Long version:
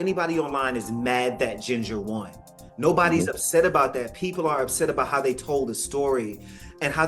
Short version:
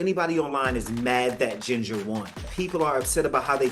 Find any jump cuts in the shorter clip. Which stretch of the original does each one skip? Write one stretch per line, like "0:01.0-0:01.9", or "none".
0:02.5-0:04.1